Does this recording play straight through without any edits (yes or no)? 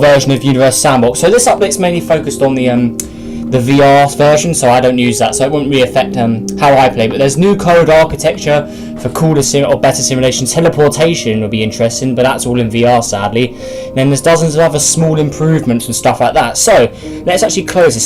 no